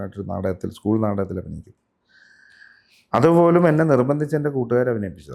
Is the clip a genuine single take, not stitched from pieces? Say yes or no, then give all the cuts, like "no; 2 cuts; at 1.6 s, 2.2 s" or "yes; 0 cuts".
yes; 0 cuts